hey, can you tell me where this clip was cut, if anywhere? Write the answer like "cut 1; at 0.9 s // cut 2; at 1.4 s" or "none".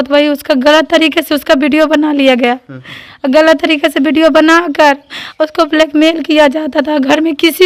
none